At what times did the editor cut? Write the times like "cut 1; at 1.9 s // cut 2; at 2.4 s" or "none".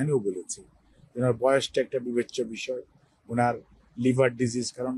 none